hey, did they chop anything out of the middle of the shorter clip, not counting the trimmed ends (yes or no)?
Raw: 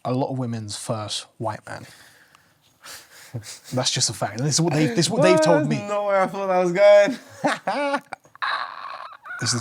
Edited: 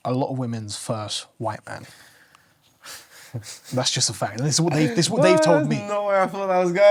no